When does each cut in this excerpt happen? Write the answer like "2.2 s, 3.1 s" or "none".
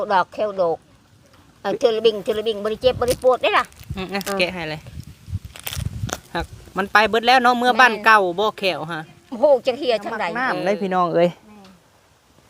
10.4 s